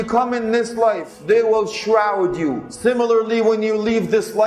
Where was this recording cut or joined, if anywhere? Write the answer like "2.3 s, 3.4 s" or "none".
1.1 s, 2.7 s

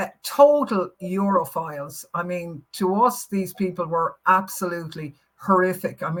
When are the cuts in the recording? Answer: none

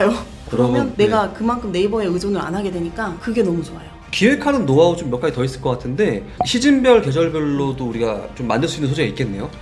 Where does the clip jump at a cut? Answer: 4.0 s

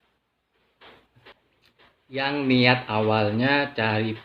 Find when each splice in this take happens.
1.4 s

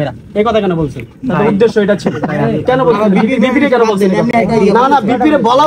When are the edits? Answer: none

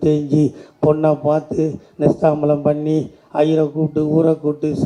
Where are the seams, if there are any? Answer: none

